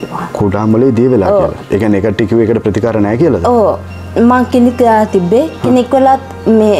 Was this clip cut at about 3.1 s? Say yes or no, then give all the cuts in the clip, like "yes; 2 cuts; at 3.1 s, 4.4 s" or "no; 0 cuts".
no; 0 cuts